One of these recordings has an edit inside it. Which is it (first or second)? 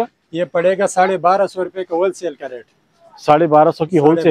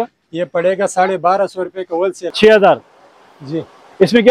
second